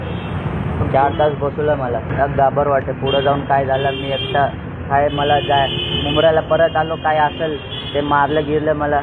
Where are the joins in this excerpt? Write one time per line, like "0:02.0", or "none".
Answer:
0:02.1